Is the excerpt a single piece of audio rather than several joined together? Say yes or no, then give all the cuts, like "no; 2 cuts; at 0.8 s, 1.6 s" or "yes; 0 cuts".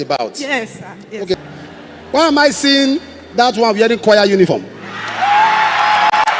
no; 1 cut; at 1.3 s